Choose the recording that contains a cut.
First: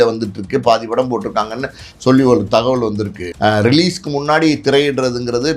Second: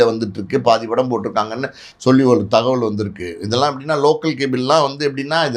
first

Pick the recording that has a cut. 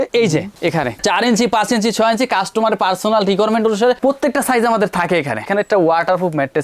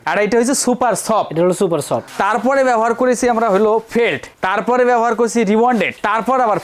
first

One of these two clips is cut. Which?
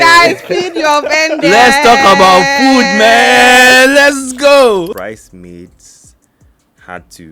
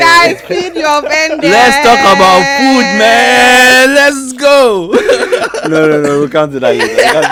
first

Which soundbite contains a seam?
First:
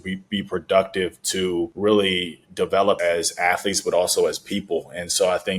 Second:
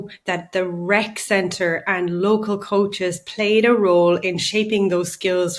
first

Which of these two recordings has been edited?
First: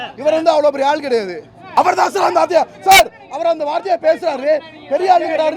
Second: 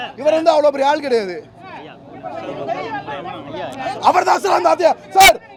first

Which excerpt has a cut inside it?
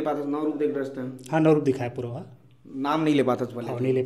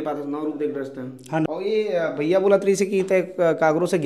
second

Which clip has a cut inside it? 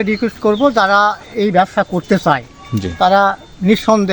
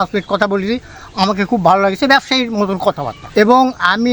second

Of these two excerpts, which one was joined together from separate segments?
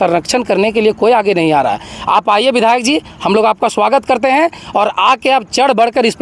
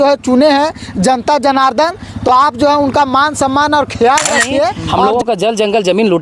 second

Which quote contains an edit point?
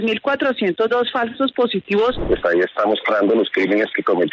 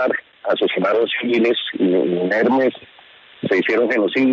first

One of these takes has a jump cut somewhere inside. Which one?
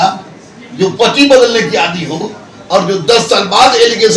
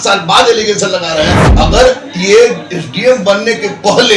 second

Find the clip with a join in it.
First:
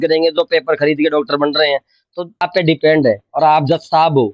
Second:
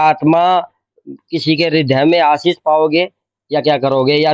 first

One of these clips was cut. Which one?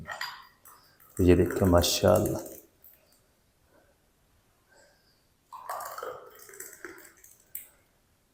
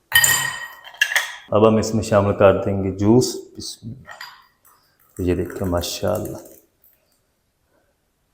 second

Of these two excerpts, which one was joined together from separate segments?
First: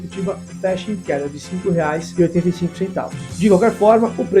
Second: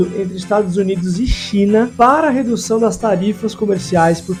first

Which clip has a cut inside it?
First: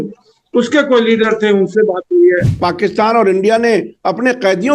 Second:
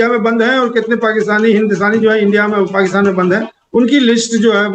first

